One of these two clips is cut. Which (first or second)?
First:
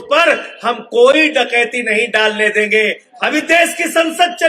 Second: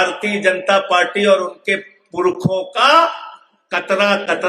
first